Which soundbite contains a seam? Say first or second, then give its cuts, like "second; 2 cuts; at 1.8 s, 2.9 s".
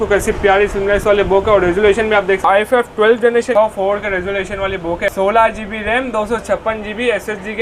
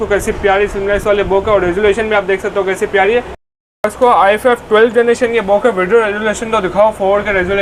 first; 3 cuts; at 2.4 s, 3.5 s, 5.1 s